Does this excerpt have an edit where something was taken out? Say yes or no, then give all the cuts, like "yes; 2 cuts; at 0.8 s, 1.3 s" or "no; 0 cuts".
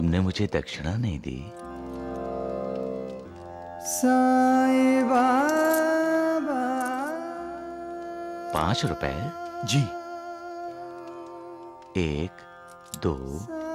yes; 2 cuts; at 1.6 s, 3.2 s